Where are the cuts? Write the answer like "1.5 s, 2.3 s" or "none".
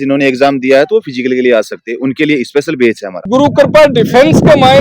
3.1 s